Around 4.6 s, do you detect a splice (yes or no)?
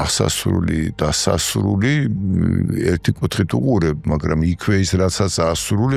no